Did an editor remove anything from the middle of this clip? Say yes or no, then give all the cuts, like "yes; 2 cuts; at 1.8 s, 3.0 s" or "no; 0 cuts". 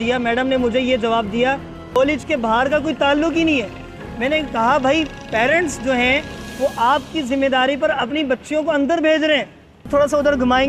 yes; 2 cuts; at 2.0 s, 9.9 s